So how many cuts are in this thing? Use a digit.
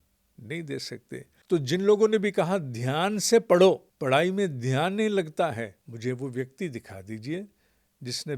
3